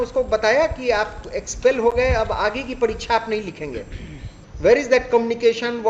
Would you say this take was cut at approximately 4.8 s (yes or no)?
no